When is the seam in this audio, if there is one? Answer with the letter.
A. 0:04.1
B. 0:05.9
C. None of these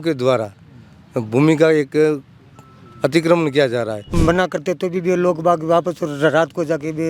A